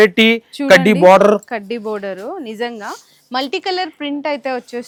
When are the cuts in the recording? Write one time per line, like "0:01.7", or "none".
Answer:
none